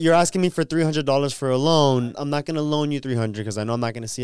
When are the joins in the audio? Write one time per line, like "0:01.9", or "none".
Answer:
0:02.1